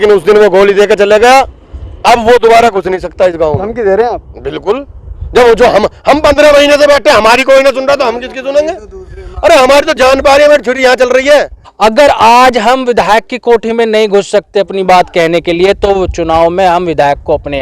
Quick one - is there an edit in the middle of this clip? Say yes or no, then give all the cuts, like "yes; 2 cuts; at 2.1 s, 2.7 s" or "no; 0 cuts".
yes; 1 cut; at 11.6 s